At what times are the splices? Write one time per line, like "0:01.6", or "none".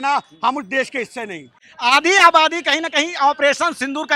none